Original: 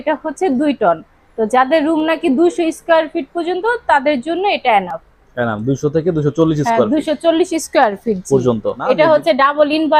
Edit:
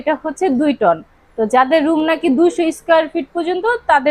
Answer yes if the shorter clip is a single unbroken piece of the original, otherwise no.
yes